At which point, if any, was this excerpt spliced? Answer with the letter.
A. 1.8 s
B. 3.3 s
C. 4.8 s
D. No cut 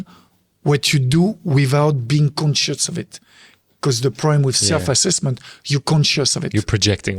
D